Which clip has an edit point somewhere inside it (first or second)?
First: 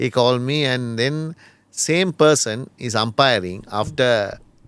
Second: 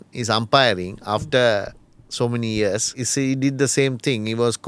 second